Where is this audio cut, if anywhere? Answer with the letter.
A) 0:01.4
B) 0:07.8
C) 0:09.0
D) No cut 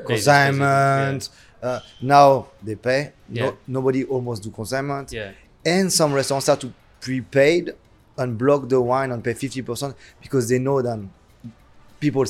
D